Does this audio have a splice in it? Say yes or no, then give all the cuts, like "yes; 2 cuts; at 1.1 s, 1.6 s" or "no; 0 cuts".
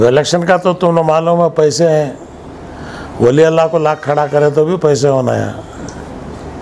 no; 0 cuts